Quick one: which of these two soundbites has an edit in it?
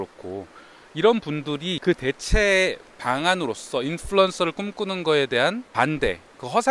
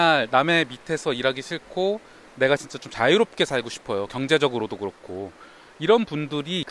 first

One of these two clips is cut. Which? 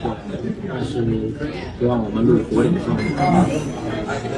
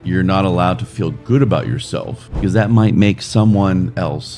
second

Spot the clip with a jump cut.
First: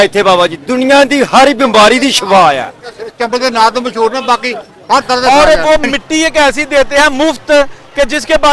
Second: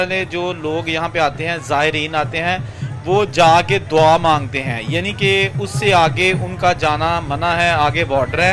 first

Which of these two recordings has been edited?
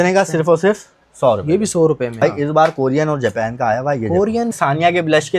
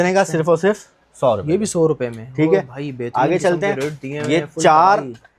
first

